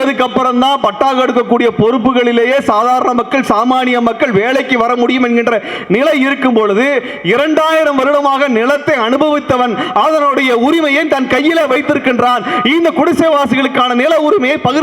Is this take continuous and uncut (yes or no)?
yes